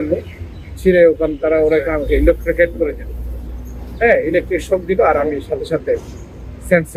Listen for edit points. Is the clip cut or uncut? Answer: uncut